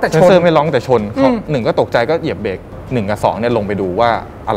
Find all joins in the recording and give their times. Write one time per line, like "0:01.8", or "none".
0:02.7